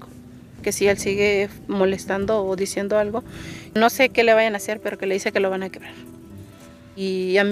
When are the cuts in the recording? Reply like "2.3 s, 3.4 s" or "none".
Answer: 5.9 s